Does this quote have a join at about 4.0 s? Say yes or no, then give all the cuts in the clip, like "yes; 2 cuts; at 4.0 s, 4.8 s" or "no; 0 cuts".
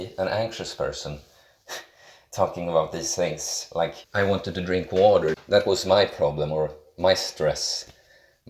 yes; 2 cuts; at 4.0 s, 5.4 s